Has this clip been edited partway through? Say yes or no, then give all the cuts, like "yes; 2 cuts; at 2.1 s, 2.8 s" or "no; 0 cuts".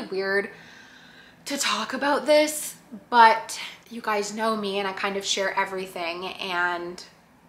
no; 0 cuts